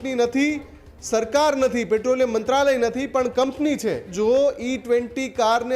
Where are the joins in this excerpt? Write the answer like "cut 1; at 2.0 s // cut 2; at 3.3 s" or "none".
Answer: cut 1; at 4.1 s